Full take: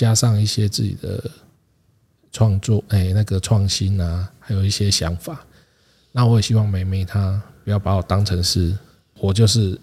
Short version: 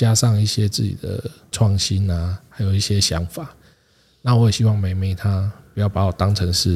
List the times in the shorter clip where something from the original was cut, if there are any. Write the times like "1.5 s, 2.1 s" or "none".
1.5 s